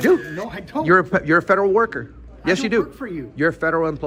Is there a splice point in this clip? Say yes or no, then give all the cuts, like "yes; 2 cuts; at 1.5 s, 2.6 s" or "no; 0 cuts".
no; 0 cuts